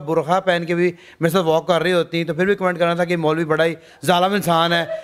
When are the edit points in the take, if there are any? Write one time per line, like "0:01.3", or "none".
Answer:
none